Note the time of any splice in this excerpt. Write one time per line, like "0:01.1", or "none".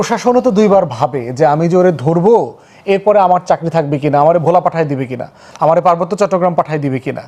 none